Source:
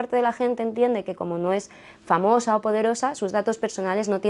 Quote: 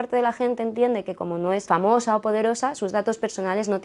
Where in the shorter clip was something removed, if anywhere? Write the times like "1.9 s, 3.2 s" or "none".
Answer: 1.6 s